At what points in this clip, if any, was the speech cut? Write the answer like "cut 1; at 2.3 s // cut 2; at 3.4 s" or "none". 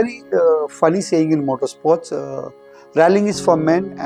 none